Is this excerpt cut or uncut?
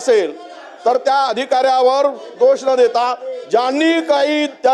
uncut